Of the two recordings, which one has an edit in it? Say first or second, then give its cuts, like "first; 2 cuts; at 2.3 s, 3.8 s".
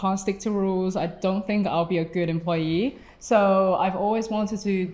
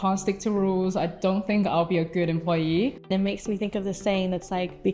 second; 1 cut; at 3.1 s